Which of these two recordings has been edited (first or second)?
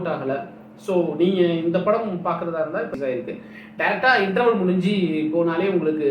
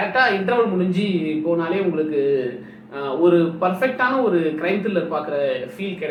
first